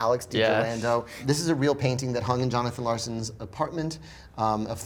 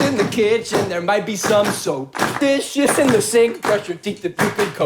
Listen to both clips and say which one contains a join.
second; 1 cut; at 3.7 s

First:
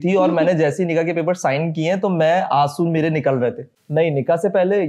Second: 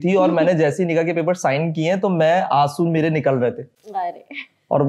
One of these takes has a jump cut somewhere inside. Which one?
first; 1 cut; at 3.7 s

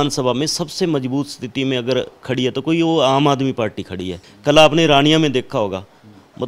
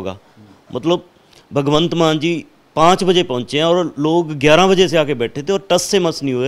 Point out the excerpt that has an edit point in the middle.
first; 1 cut; at 4.2 s

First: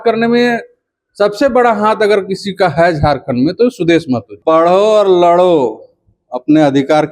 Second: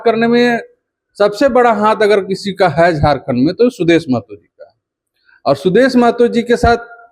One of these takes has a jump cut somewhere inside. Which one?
first; 1 cut; at 4.3 s

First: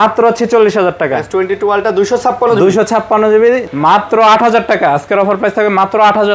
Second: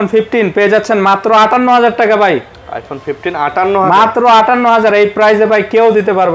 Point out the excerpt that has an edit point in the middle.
first; 1 cut; at 3.7 s

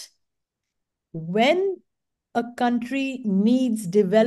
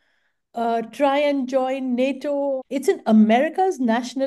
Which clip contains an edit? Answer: second; 1 cut; at 2.6 s

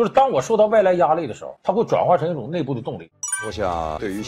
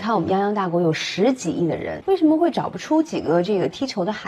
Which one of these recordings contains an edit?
first; 1 cut; at 2.9 s

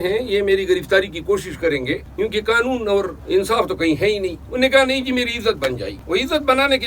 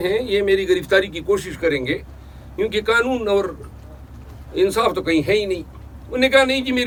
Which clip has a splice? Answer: first; 4 cuts; at 2.1 s, 3.2 s, 4.4 s, 5.9 s

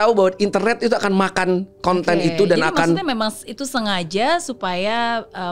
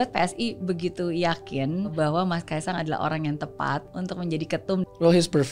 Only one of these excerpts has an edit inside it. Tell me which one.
second; 3 cuts; at 1.9 s, 3.9 s, 4.8 s

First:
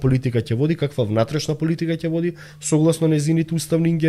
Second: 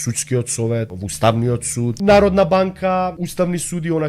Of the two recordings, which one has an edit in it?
second; 3 cuts; at 1.0 s, 1.9 s, 3.2 s

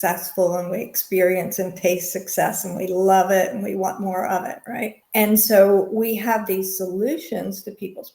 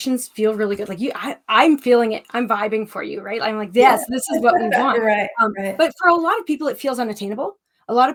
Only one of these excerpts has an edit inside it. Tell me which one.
first; 1 cut; at 5.0 s

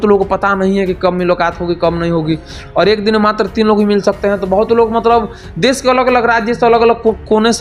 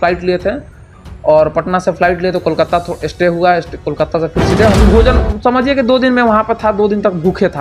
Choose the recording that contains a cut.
second; 1 cut; at 4.8 s

